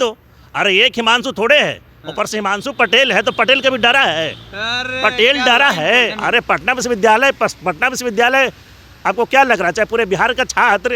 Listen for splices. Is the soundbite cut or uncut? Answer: cut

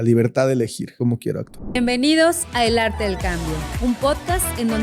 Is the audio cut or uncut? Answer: cut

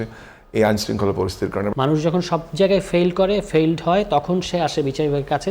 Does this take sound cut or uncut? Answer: cut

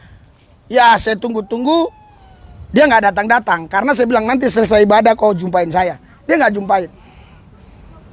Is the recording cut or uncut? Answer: uncut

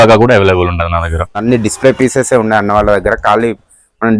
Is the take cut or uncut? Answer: cut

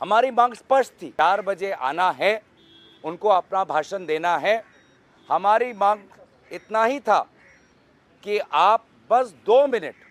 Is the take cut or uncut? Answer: cut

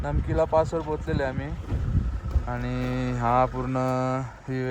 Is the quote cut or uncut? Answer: uncut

